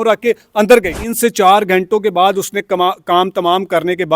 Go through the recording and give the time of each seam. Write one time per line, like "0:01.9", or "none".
0:01.0